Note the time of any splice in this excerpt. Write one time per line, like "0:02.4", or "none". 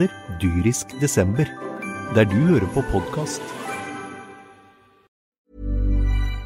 0:05.1